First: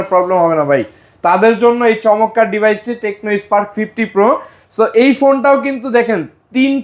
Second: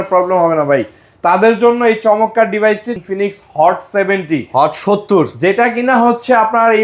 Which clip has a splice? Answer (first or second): second